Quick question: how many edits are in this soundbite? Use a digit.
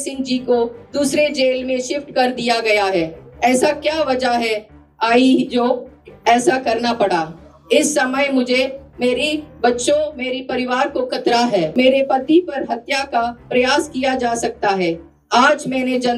1